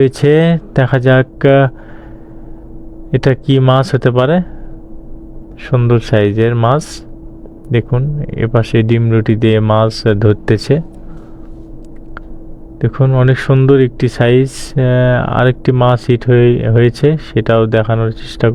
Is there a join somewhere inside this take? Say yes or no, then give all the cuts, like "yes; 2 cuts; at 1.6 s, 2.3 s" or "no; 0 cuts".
no; 0 cuts